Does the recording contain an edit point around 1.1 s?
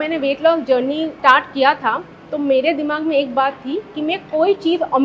yes; 1 cut; at 1.1 s

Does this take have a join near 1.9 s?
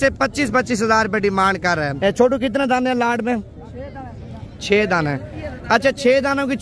yes; 1 cut; at 1.9 s

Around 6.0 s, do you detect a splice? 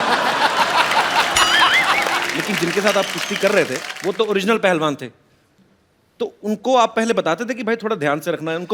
no; 2 cuts; at 2.3 s, 3.9 s

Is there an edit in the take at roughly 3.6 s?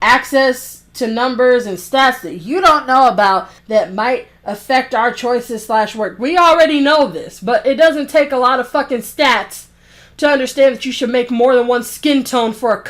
yes; 1 cut; at 3.6 s

